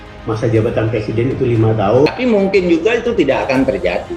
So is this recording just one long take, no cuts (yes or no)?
no